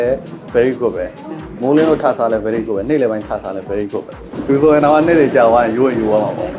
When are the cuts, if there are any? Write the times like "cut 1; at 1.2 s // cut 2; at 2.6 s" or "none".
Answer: cut 1; at 4.3 s